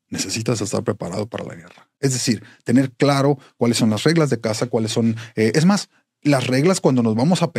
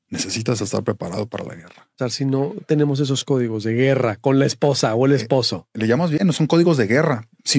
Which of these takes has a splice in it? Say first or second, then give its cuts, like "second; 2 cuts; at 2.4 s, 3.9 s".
second; 1 cut; at 2.0 s